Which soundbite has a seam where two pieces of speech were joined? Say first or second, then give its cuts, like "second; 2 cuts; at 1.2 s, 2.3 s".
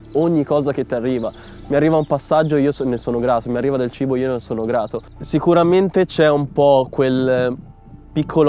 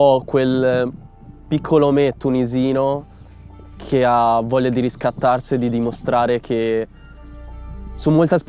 first; 1 cut; at 5.2 s